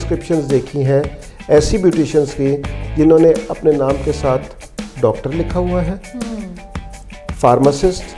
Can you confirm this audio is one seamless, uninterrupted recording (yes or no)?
yes